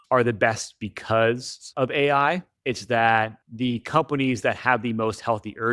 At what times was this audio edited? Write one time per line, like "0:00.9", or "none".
0:02.5

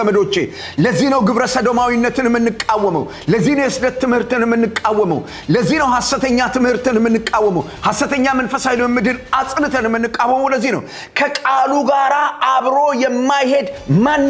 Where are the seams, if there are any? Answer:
none

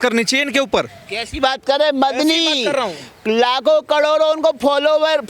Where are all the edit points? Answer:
none

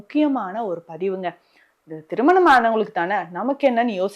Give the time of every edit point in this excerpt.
none

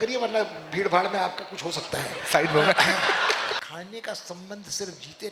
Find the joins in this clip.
0:03.5

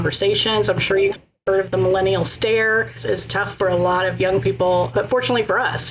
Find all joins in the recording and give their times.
0:03.0
0:04.9

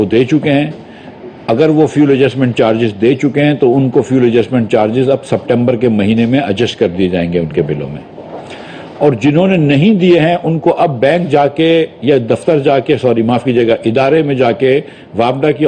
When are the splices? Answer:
none

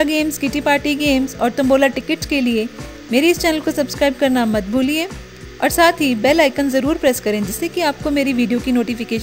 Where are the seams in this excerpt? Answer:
none

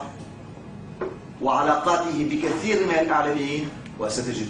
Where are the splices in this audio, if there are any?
none

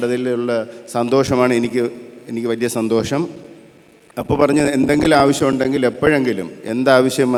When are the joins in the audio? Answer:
none

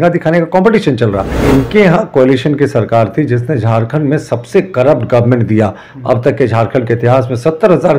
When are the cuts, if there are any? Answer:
0:01.7

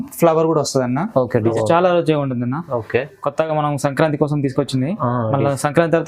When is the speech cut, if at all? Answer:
0:01.5

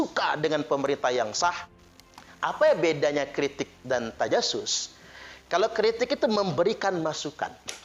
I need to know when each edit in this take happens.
none

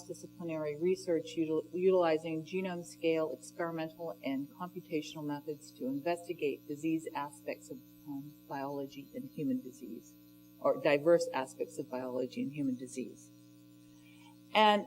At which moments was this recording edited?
0:07.0

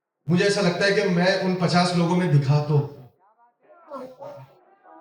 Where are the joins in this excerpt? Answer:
0:04.0

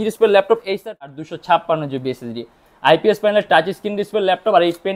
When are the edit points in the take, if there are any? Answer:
0:01.1

